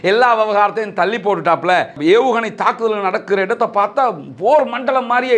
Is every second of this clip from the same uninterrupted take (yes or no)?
no